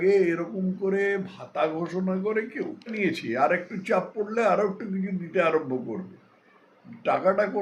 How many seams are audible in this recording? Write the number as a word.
one